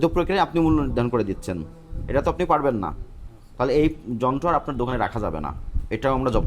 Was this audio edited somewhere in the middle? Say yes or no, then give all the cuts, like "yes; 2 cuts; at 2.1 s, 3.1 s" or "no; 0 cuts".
no; 0 cuts